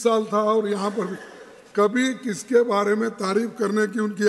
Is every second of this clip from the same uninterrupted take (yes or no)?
yes